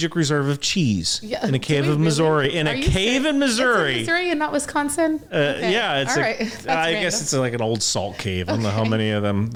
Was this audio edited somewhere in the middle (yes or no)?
no